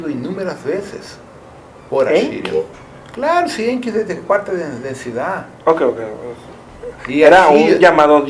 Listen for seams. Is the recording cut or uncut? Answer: uncut